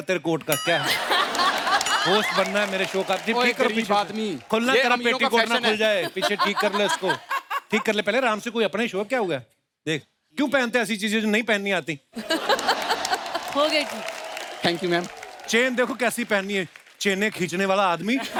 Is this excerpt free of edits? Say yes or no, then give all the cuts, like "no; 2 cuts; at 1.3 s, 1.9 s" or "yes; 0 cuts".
yes; 0 cuts